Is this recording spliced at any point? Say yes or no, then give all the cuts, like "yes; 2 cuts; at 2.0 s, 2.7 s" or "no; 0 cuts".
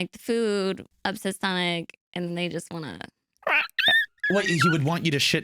yes; 2 cuts; at 0.9 s, 4.1 s